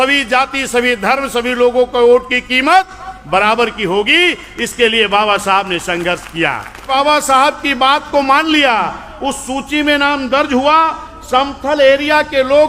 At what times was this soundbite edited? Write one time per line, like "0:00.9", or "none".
0:06.9